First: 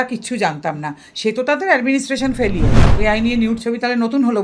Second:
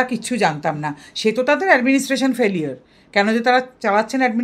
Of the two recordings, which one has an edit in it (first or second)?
first